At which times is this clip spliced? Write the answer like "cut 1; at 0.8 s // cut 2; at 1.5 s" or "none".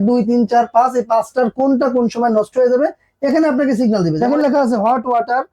cut 1; at 4.2 s

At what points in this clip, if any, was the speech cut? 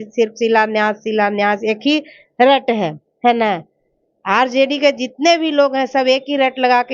none

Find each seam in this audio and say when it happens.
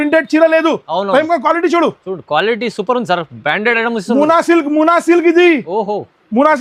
none

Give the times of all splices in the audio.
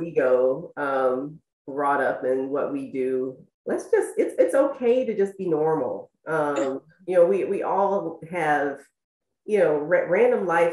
cut 1; at 3.5 s

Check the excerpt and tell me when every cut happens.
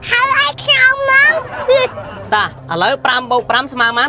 cut 1; at 2.1 s

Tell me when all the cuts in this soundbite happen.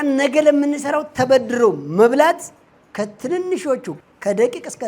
cut 1; at 3.9 s

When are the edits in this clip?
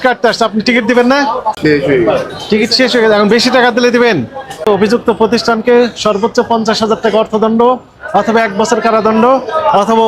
cut 1; at 1.5 s // cut 2; at 4.7 s

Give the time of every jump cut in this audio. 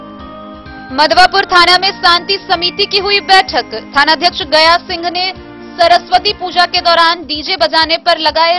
none

